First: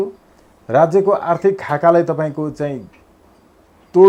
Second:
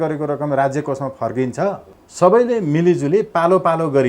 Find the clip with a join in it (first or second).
second